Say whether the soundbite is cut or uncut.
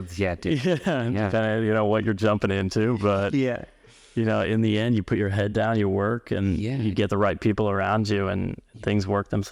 uncut